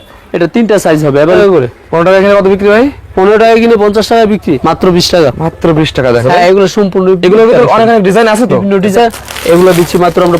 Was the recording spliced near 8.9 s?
yes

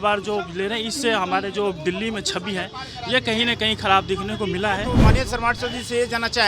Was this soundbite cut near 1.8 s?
no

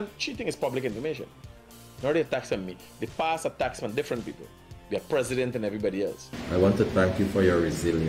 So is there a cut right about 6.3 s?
yes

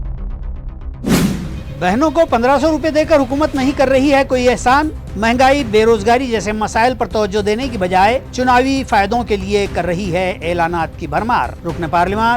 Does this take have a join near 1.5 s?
yes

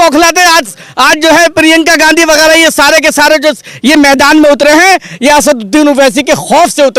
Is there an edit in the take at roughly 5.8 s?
no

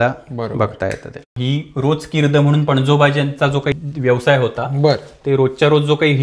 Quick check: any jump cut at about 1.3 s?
yes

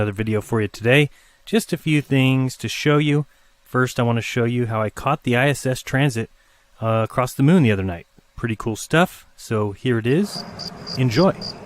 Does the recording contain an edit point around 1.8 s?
yes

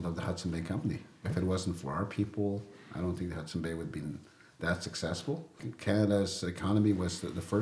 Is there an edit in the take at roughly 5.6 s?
yes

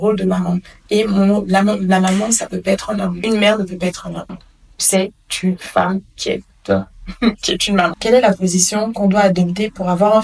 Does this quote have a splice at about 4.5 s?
no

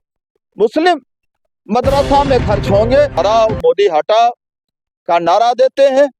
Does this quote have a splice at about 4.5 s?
no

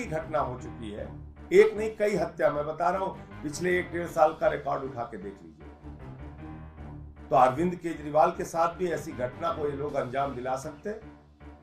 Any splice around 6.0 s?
yes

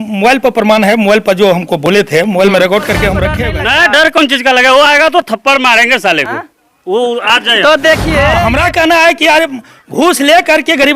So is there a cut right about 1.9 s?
no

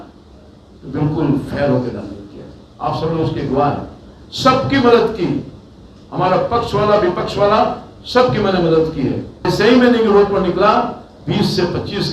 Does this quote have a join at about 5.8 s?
no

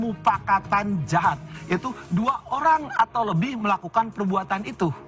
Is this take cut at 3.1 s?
no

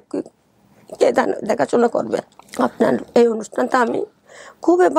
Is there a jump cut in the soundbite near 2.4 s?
yes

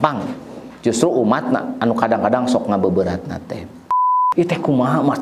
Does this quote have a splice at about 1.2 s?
no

